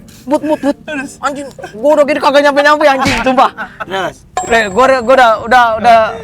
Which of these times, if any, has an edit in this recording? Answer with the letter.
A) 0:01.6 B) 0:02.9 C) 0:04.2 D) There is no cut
C